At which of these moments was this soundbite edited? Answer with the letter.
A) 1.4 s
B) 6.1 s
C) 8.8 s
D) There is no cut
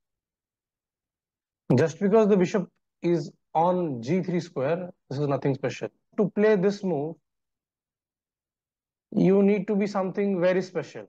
B